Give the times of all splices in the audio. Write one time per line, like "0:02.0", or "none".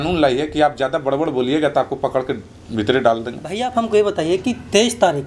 0:03.6